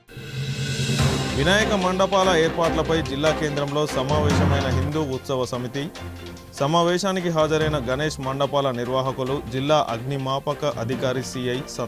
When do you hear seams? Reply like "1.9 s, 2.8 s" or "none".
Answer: 1.2 s